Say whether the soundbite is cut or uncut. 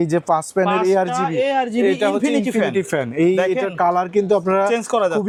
uncut